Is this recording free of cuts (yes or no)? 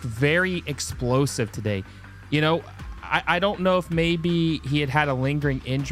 yes